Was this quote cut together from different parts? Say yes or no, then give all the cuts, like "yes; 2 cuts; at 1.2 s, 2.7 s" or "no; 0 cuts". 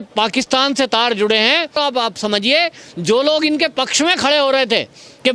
yes; 1 cut; at 1.8 s